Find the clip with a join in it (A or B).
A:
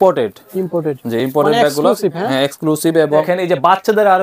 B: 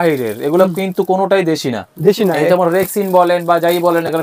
A